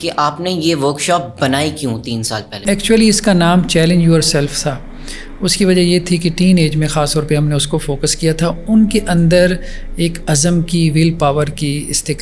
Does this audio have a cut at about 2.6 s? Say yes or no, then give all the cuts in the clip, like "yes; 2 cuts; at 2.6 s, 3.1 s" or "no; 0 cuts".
yes; 1 cut; at 2.6 s